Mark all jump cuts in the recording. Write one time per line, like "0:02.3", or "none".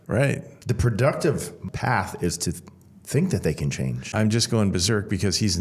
0:01.6
0:04.1